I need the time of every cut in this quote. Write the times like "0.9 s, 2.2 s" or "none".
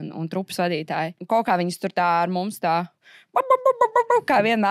1.2 s